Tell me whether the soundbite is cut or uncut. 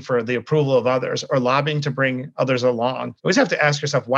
cut